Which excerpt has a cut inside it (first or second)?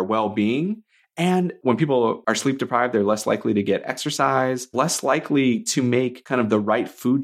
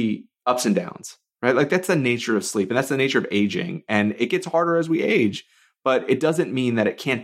first